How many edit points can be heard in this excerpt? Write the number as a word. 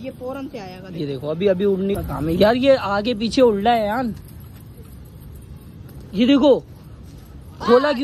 one